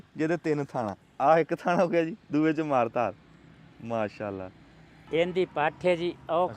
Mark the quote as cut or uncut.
cut